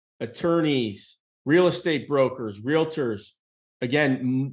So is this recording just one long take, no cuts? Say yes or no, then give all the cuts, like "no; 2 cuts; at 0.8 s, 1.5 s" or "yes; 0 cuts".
yes; 0 cuts